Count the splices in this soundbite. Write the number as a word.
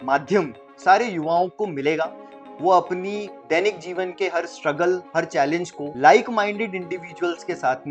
one